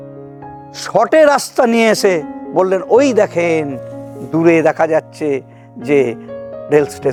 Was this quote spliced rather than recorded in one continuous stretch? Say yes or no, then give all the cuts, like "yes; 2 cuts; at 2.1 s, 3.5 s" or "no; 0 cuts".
no; 0 cuts